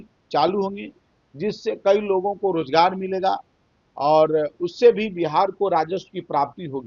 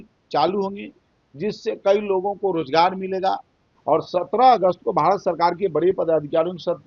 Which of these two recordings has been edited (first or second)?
second